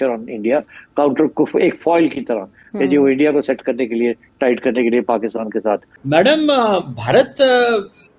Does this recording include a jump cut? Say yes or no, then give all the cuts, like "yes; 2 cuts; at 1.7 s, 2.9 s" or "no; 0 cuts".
yes; 1 cut; at 5.9 s